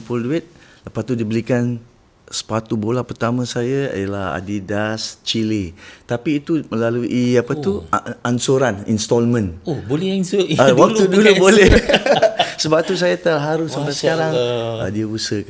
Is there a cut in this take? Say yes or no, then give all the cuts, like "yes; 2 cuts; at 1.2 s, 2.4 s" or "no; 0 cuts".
no; 0 cuts